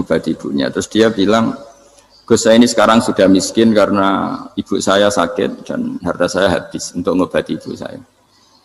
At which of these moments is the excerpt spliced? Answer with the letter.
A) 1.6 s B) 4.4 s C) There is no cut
C